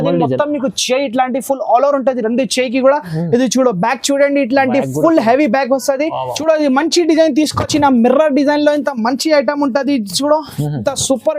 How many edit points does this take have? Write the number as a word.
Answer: one